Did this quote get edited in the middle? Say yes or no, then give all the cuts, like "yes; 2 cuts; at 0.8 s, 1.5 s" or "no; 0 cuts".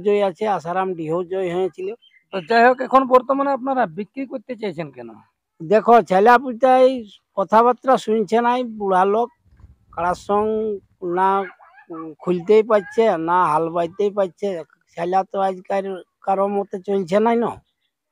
no; 0 cuts